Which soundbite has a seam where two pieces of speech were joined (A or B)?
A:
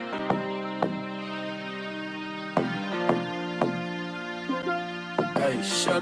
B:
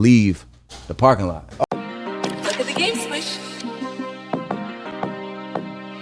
B